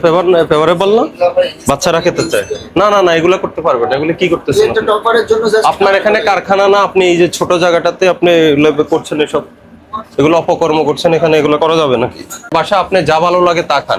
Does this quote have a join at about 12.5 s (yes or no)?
yes